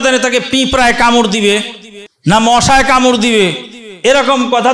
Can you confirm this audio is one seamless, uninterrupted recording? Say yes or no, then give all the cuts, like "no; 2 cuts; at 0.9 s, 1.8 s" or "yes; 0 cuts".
no; 1 cut; at 2.4 s